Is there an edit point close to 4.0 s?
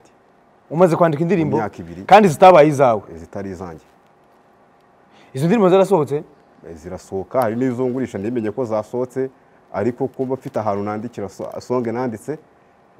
no; 0 cuts

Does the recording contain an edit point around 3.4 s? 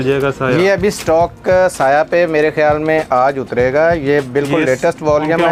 no; 0 cuts

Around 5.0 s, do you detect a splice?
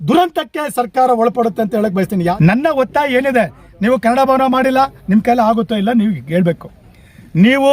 no; 1 cut; at 2.4 s

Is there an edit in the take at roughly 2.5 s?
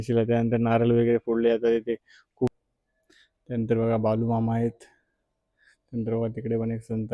yes; 1 cut; at 2.5 s

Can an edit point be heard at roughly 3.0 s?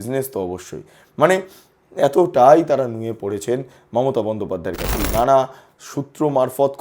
no; 1 cut; at 4.9 s

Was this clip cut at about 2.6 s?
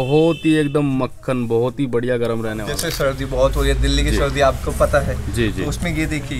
yes; 1 cut; at 2.6 s

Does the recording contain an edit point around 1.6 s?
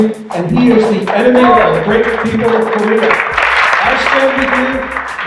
no; 1 cut; at 3.4 s

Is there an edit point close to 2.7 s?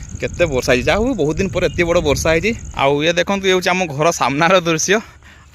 yes; 1 cut; at 2.7 s

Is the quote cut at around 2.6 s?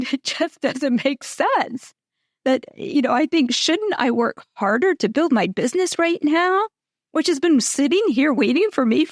no; 0 cuts

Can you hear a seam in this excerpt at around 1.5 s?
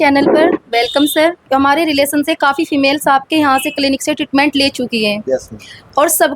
yes; 1 cut; at 1.5 s

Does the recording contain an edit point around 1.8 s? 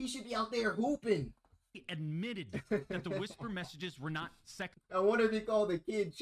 yes; 1 cut; at 1.8 s

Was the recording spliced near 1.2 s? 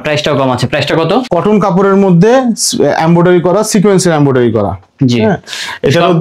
yes; 1 cut; at 1.2 s

